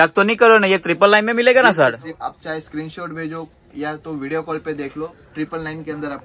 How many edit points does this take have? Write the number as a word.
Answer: one